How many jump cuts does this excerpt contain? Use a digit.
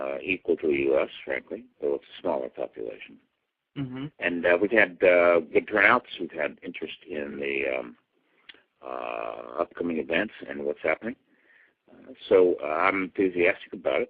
0